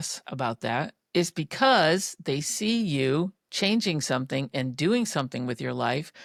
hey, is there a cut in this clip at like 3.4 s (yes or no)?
no